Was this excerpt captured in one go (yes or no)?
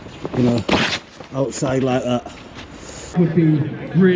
no